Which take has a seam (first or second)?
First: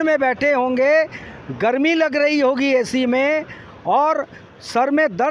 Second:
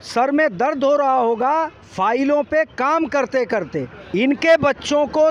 second